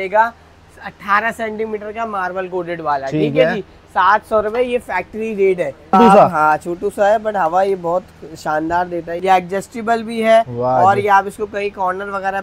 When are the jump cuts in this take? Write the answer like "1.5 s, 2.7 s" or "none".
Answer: 5.9 s, 9.1 s

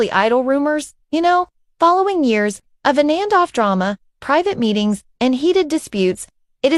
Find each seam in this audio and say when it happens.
none

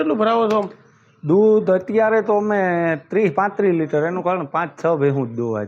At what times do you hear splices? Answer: none

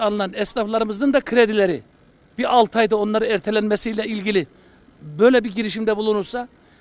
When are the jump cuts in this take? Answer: none

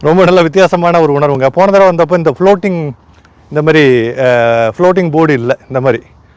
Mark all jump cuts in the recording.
none

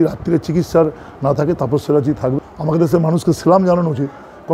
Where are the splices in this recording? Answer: 2.4 s

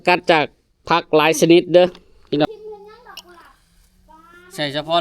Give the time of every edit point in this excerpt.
2.5 s

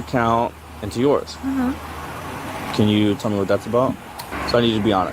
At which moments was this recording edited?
4.2 s

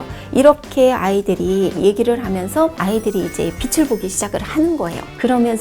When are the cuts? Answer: 2.7 s

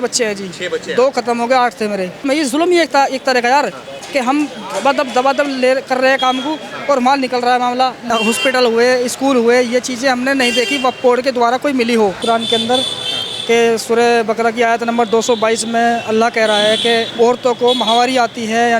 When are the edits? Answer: 2.3 s, 8.0 s, 12.2 s, 17.1 s

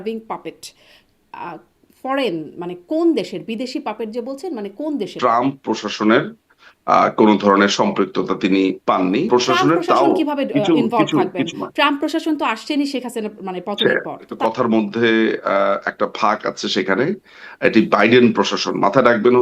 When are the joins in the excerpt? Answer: 5.1 s, 9.3 s, 14.3 s

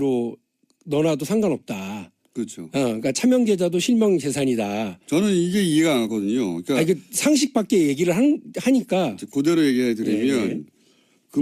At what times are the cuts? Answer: 10.3 s

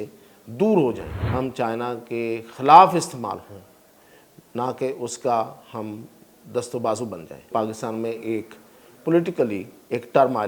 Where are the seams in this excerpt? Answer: 1.1 s, 7.5 s

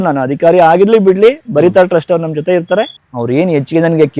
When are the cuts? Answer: 2.9 s

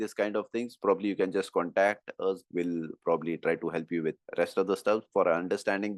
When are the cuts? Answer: 2.4 s, 4.2 s

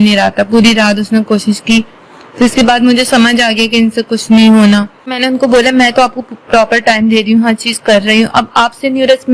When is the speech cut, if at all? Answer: 5.1 s

